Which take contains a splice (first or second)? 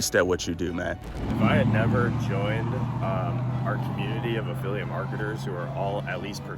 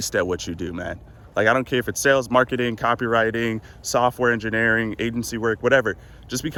first